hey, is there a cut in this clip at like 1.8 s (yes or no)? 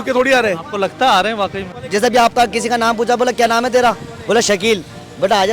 yes